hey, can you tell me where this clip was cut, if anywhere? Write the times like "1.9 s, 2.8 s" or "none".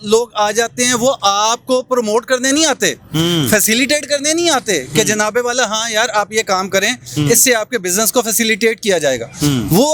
none

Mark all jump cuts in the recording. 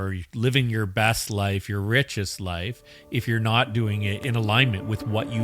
4.2 s

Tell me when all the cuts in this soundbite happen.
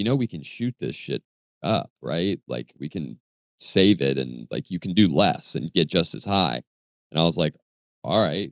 none

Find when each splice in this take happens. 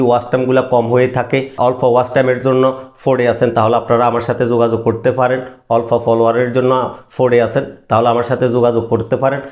1.6 s

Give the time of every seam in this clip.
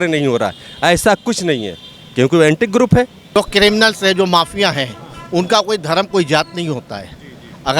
3.4 s

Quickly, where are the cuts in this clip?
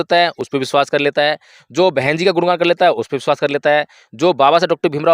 none

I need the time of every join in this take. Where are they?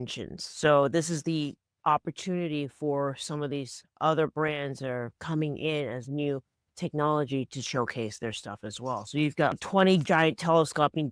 9.6 s

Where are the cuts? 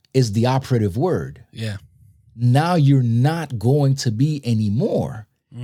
none

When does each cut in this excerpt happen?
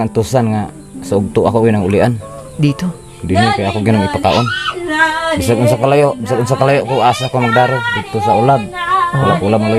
none

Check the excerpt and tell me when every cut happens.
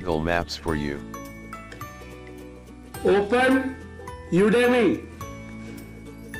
1.0 s, 3.0 s, 5.0 s

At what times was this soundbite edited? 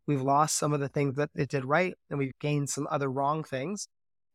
2.3 s

